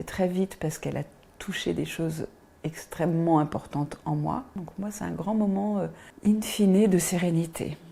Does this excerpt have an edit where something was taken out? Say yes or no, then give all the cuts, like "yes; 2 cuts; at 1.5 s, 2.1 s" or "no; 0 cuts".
yes; 1 cut; at 6.0 s